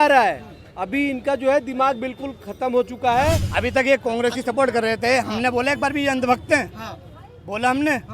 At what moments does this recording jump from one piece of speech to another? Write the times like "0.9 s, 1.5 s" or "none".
3.5 s